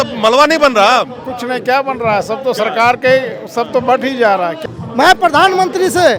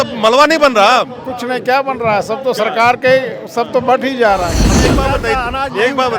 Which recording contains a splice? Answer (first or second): second